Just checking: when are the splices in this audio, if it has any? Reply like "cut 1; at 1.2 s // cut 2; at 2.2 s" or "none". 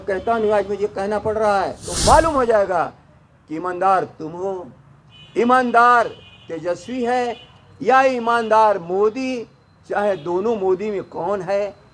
cut 1; at 1.9 s